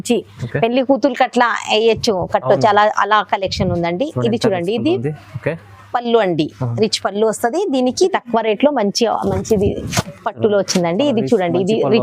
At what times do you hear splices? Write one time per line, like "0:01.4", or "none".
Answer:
0:08.1